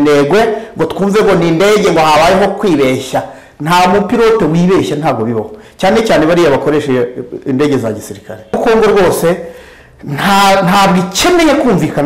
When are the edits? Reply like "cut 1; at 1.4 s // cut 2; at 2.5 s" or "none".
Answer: cut 1; at 8.6 s